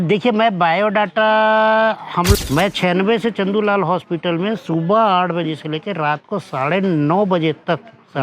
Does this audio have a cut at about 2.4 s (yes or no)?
yes